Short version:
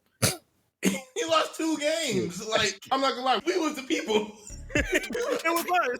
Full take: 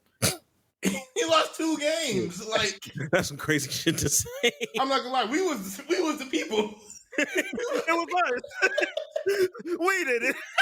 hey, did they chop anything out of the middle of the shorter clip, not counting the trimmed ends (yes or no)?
yes